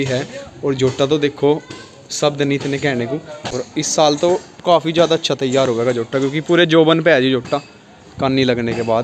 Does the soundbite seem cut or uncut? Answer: cut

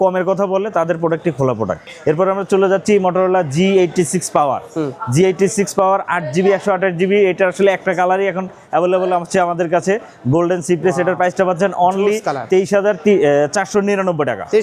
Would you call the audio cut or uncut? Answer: uncut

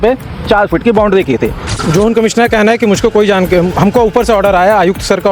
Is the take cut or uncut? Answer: cut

